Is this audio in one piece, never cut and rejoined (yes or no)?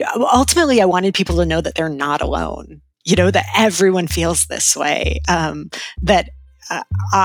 yes